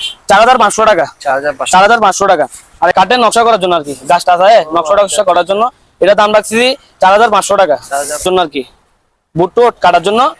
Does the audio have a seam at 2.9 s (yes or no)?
yes